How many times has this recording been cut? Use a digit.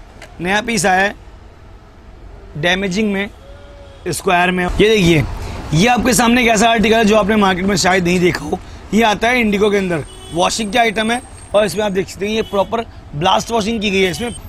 1